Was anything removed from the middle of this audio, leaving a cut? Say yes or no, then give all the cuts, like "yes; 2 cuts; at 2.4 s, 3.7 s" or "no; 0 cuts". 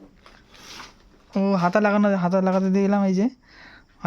yes; 1 cut; at 1.2 s